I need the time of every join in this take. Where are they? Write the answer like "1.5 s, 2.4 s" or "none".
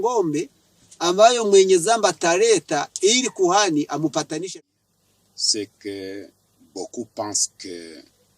4.5 s